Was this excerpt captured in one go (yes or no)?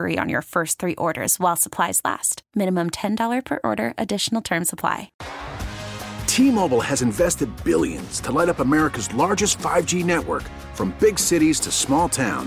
no